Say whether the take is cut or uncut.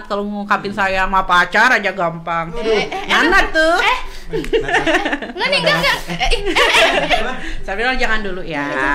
uncut